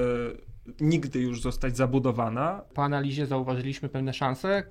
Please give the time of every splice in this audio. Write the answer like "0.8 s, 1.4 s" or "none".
2.7 s